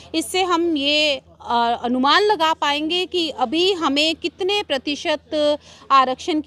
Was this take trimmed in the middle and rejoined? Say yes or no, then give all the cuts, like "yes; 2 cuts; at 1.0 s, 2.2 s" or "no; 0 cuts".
no; 0 cuts